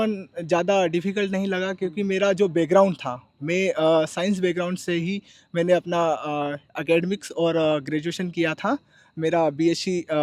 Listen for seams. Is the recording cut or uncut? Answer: uncut